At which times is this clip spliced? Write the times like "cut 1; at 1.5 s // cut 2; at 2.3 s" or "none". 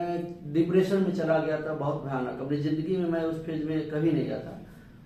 none